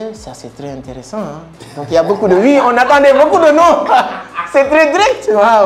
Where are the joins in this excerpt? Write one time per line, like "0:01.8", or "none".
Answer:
none